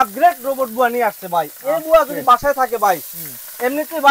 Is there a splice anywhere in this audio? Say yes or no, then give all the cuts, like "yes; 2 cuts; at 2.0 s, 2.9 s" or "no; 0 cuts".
no; 0 cuts